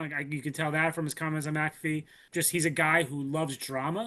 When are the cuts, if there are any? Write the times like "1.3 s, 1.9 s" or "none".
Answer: 2.2 s